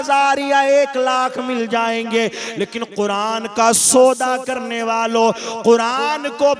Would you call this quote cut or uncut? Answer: uncut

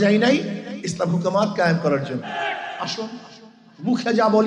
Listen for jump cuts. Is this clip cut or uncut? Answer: cut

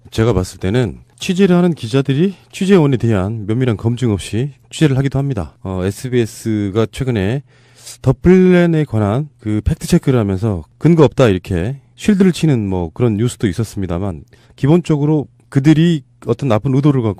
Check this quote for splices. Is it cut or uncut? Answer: uncut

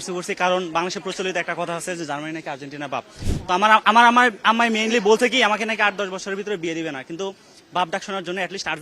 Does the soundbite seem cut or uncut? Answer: uncut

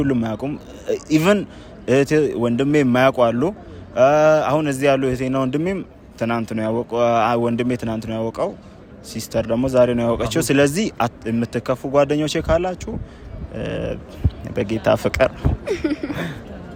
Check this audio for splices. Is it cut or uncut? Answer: uncut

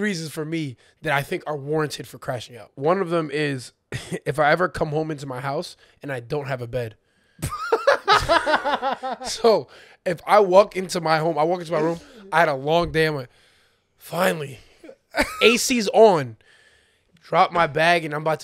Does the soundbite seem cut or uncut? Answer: cut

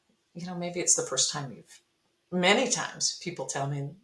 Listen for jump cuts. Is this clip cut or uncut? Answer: uncut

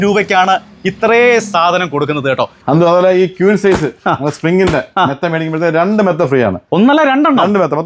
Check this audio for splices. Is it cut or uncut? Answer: cut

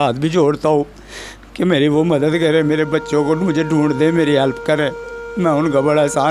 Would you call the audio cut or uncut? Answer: uncut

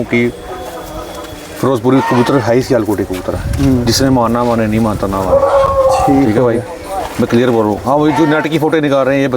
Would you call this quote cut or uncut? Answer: uncut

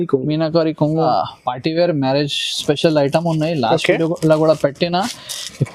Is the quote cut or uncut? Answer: cut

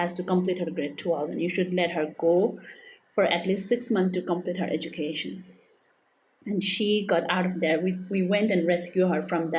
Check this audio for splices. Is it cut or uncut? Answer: uncut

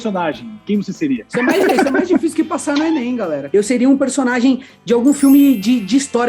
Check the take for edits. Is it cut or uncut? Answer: cut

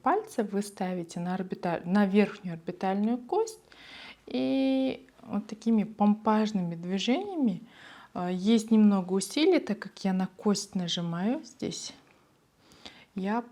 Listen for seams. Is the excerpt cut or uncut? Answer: uncut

